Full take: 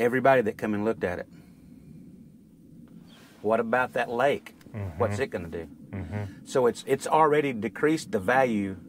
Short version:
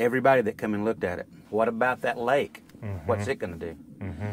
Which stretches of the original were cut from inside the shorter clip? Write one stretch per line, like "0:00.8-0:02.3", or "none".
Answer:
0:01.3-0:03.2